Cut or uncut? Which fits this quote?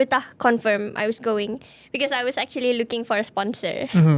uncut